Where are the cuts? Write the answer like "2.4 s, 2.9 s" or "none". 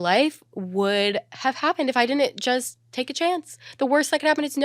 none

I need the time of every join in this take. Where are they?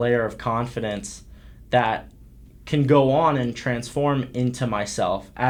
none

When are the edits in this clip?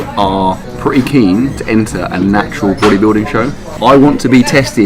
3.7 s

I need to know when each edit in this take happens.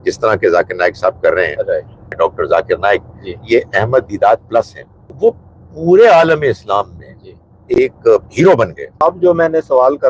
2.1 s, 5.1 s, 9.0 s

